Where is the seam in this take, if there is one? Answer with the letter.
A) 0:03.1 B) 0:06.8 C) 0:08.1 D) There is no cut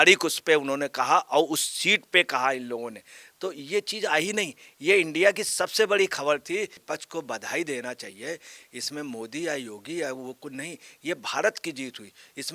B